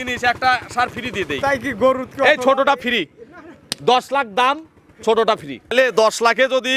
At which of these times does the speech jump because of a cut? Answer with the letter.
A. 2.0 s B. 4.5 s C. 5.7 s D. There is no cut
C